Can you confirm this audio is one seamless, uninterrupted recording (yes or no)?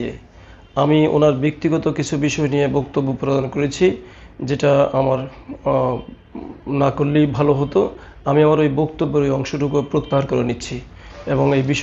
yes